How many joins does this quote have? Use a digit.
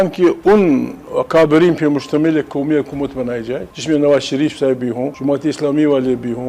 3